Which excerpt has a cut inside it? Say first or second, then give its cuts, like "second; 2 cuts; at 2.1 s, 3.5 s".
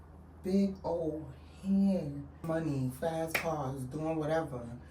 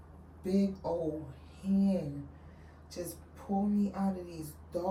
first; 1 cut; at 2.4 s